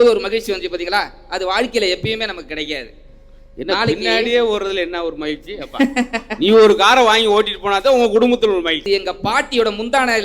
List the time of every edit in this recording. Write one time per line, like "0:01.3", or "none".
0:08.8